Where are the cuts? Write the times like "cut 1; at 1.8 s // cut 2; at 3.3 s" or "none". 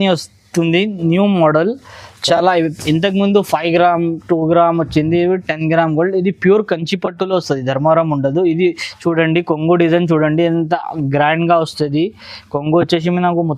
none